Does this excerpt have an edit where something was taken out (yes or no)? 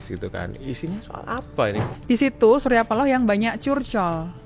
yes